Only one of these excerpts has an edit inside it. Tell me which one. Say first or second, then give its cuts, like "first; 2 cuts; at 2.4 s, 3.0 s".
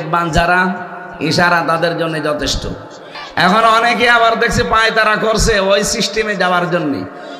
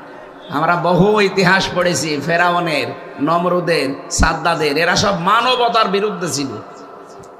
first; 1 cut; at 3.2 s